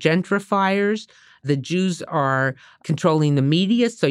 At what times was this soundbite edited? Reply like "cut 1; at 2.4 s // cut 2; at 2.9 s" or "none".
cut 1; at 1.4 s // cut 2; at 2.8 s

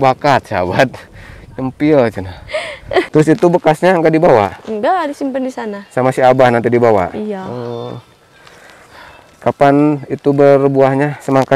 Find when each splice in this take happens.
cut 1; at 3.1 s

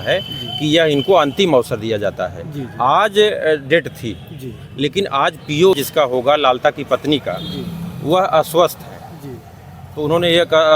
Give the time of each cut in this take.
cut 1; at 5.7 s

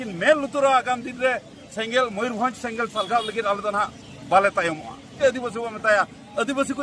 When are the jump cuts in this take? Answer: cut 1; at 5.2 s

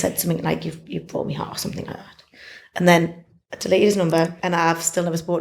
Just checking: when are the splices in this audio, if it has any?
cut 1; at 4.4 s

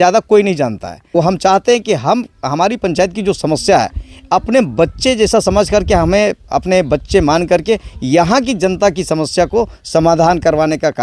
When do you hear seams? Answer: cut 1; at 1.1 s

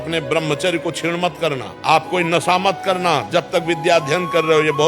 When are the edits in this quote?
cut 1; at 1.7 s

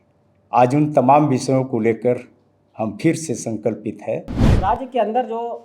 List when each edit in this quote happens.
cut 1; at 4.5 s

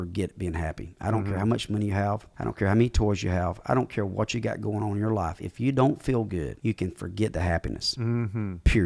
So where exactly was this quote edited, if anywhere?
cut 1; at 2.3 s // cut 2; at 6.5 s

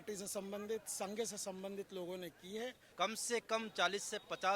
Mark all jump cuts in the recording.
cut 1; at 2.8 s

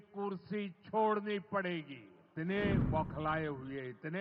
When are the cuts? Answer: cut 1; at 2.2 s

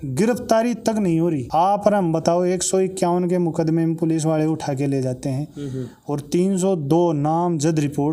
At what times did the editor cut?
none

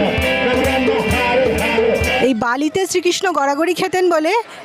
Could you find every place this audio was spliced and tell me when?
cut 1; at 2.2 s

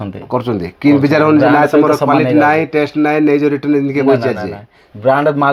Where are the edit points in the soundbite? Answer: none

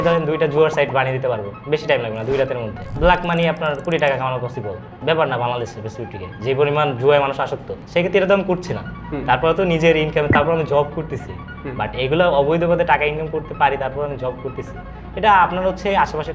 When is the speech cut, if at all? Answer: cut 1; at 2.9 s // cut 2; at 5.0 s // cut 3; at 7.8 s

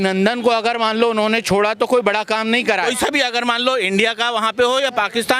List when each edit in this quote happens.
cut 1; at 2.9 s

